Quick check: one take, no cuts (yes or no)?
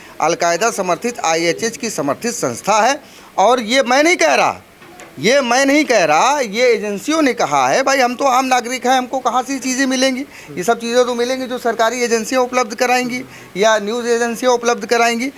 yes